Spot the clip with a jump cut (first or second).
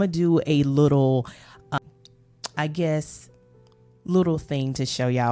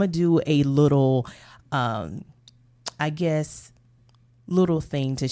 first